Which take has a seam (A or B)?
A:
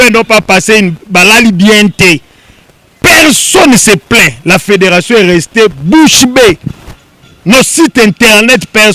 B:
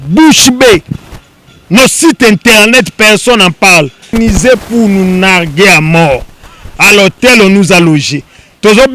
B